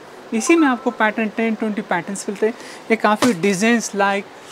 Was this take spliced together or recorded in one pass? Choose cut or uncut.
uncut